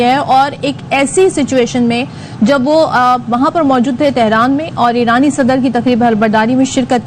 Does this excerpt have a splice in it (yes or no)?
no